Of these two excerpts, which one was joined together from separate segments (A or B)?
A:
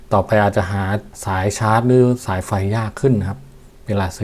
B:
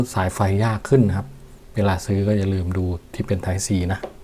A